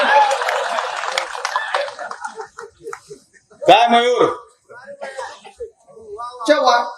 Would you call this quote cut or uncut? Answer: uncut